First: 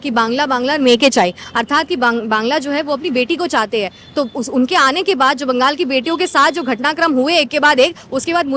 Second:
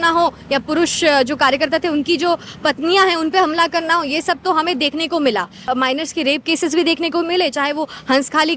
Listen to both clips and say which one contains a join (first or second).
second